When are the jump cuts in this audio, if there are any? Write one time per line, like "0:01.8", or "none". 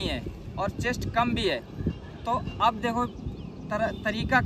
none